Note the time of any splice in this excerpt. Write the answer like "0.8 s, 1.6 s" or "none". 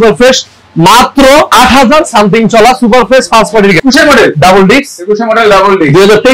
3.8 s